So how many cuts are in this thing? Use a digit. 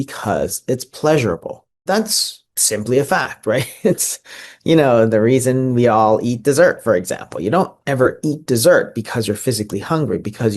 1